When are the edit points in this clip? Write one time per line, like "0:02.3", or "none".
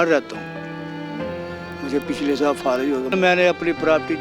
0:03.1